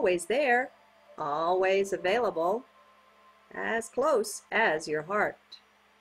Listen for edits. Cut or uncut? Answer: uncut